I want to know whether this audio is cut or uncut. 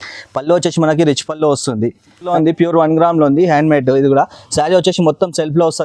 cut